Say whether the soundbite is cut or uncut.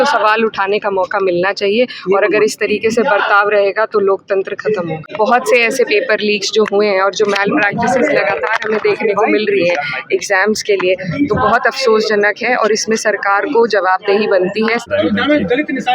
cut